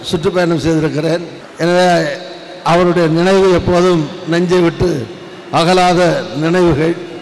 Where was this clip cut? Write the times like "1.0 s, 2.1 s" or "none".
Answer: 1.4 s

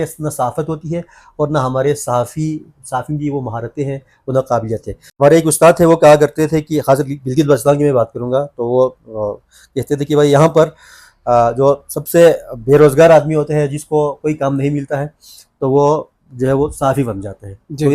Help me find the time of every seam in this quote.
5.2 s

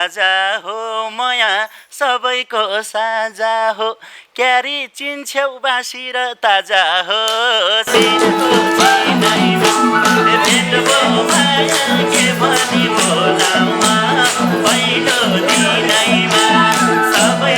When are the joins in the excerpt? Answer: none

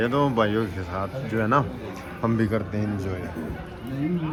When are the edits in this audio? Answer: none

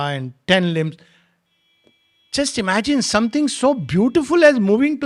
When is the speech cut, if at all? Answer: none

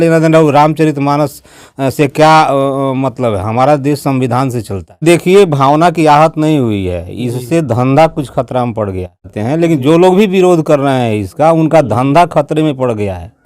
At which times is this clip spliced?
5.0 s

